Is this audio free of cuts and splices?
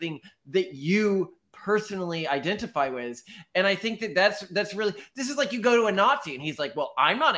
yes; 0 cuts

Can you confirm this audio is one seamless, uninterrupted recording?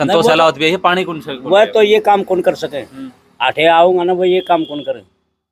yes; 0 cuts

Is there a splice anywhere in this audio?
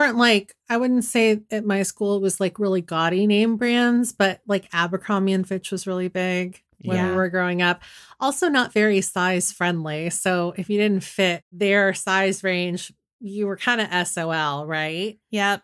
no; 0 cuts

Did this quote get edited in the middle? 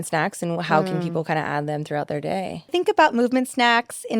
yes; 1 cut; at 2.7 s

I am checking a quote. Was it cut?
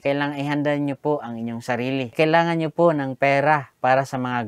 yes; 1 cut; at 2.1 s

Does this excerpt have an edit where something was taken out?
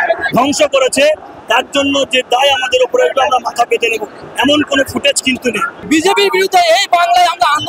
yes; 1 cut; at 5.7 s

